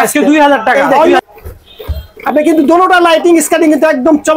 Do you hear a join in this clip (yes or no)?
yes